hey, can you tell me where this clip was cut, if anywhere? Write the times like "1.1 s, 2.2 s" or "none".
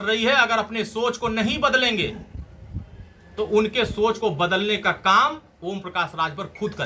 none